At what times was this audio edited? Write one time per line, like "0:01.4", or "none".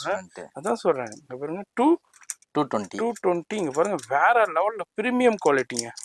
none